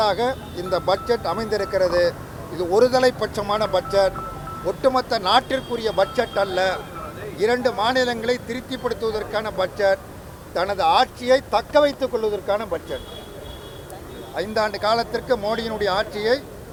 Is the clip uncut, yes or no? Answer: yes